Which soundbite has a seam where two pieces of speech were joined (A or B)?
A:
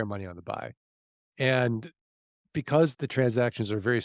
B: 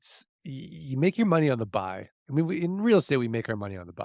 A